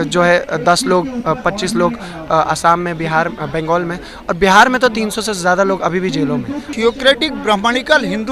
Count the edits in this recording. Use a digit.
1